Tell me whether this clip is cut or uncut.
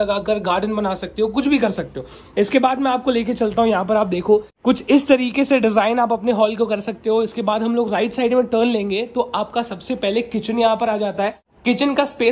uncut